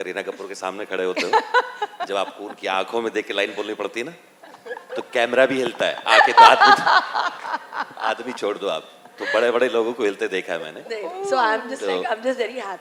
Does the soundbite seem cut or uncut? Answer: uncut